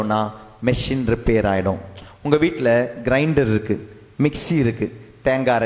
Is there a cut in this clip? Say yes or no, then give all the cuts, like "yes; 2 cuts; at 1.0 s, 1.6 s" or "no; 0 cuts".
no; 0 cuts